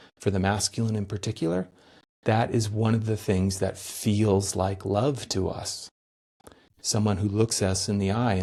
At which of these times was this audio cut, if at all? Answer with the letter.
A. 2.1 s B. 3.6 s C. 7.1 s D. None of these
D